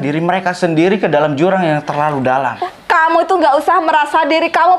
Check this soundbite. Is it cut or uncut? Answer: cut